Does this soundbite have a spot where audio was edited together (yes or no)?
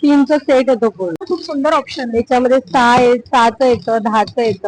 yes